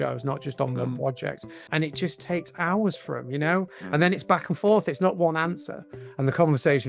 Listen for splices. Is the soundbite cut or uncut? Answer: cut